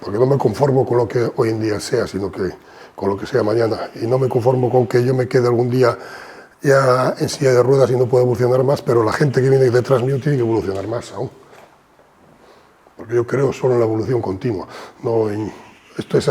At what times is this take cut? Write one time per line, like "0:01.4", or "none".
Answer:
none

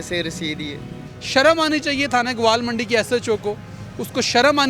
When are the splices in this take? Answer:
0:01.1

